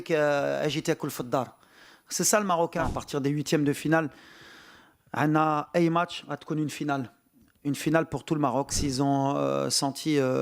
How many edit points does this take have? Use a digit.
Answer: 2